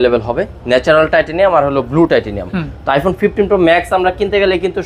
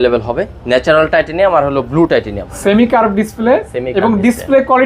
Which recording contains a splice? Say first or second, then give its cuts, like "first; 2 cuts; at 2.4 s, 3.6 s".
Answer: second; 1 cut; at 2.5 s